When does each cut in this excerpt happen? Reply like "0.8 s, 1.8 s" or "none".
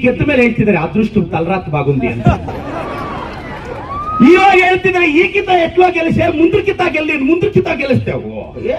none